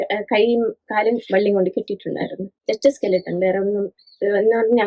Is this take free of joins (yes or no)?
no